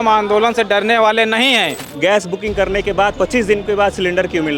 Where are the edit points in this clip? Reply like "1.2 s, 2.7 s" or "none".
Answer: 1.8 s